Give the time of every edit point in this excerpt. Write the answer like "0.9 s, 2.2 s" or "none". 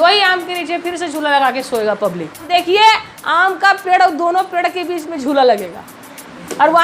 2.5 s